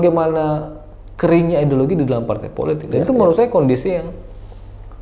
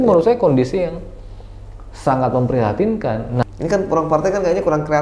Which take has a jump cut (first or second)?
second